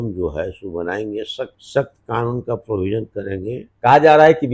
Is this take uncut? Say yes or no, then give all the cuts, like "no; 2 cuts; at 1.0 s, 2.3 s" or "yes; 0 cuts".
no; 2 cuts; at 1.6 s, 3.6 s